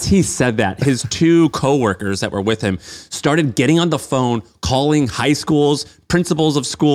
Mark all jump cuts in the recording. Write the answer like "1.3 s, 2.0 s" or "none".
none